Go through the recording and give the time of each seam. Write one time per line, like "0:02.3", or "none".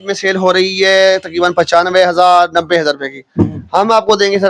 none